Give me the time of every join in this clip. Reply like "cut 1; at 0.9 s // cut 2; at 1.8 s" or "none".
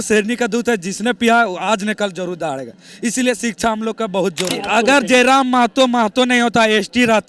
cut 1; at 4.6 s